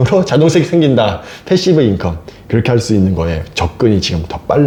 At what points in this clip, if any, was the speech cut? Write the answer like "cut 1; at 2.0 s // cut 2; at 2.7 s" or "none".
none